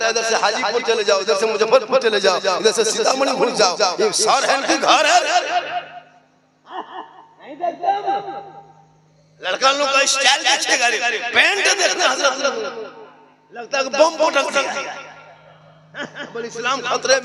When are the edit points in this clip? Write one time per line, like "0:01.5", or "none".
none